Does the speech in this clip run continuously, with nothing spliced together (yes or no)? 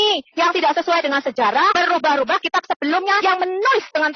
no